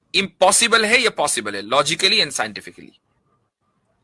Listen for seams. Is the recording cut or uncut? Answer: uncut